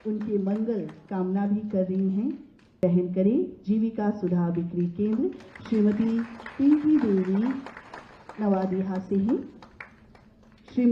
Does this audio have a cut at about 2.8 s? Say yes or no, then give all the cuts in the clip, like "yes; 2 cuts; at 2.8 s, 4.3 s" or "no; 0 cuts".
yes; 1 cut; at 2.8 s